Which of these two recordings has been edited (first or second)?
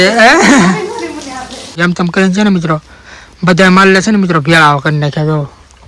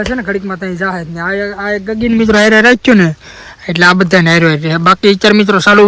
first